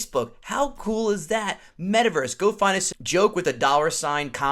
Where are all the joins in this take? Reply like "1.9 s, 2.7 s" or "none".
2.9 s